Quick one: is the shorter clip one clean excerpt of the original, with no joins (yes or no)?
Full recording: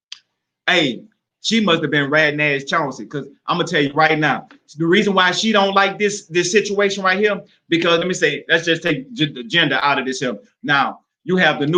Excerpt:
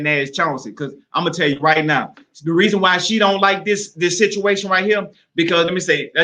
yes